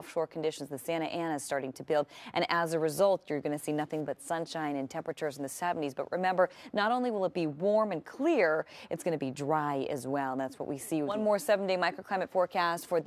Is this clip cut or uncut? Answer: uncut